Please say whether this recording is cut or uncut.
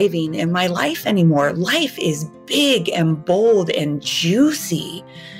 uncut